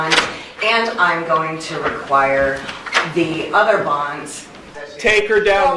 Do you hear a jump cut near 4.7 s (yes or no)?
yes